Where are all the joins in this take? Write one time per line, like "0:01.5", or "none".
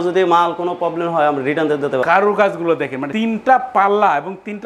0:02.0
0:03.0